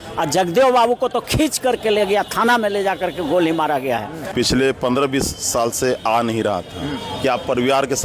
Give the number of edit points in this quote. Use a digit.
1